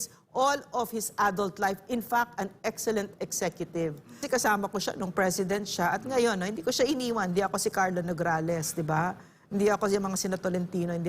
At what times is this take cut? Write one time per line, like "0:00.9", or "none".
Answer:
0:04.2